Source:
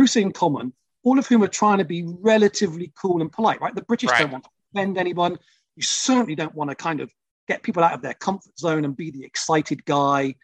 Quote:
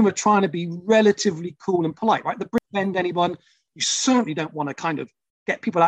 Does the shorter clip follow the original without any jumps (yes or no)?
no